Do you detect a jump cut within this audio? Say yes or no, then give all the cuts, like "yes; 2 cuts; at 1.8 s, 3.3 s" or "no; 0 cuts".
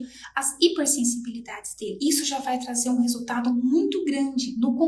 no; 0 cuts